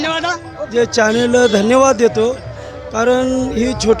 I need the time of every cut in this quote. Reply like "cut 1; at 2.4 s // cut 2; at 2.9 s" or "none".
none